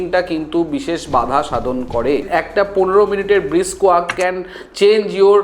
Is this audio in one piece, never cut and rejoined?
no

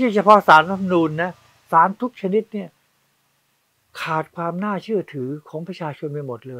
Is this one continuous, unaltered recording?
yes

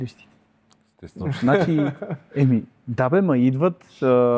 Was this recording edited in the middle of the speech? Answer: no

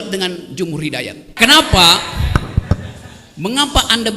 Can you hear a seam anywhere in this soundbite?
yes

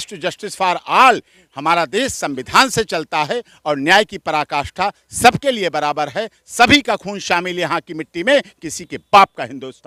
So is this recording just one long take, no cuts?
yes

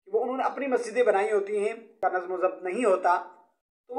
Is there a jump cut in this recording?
yes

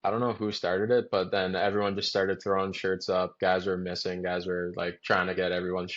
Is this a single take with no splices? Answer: yes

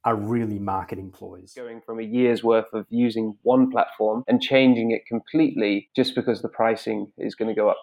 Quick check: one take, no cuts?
no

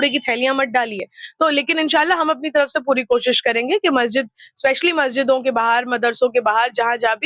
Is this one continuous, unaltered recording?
yes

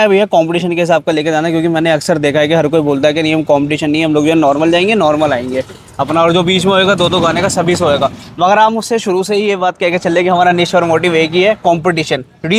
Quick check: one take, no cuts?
yes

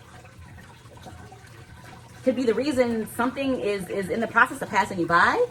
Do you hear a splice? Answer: no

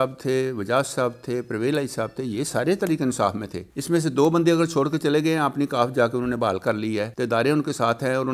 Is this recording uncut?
yes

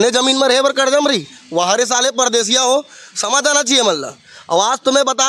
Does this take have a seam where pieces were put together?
no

